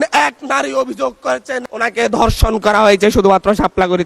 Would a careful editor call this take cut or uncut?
uncut